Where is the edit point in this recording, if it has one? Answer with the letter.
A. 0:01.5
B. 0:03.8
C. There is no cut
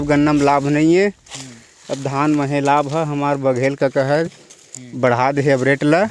C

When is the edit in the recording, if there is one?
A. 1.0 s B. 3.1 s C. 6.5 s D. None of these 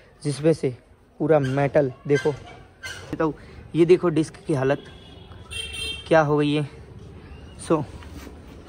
B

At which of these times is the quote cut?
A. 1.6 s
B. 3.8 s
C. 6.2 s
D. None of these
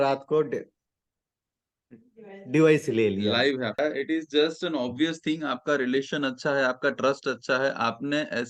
B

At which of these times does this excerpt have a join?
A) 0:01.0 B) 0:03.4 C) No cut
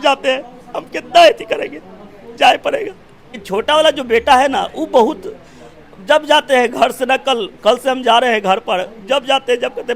B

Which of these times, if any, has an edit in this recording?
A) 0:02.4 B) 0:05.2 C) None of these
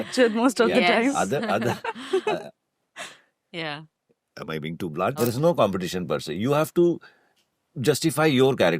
B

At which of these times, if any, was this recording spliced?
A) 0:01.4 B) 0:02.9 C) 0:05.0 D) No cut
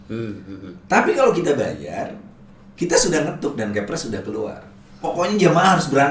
C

